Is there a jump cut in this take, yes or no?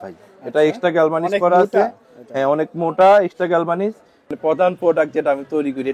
yes